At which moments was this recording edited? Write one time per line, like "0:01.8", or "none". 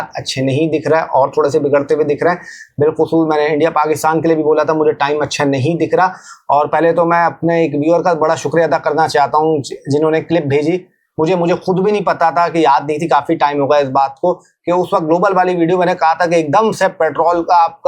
none